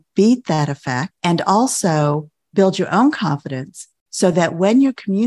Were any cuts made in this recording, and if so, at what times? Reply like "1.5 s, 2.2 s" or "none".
1.1 s, 2.3 s